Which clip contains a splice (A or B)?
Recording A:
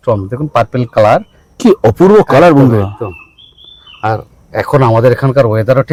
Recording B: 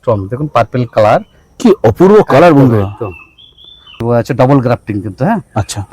B